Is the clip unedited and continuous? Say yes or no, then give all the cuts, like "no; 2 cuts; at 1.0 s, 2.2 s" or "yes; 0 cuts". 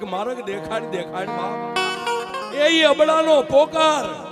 no; 1 cut; at 2.2 s